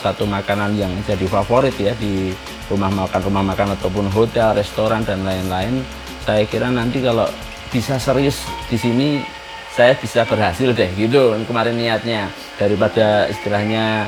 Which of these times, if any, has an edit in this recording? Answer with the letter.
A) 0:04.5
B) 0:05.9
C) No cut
C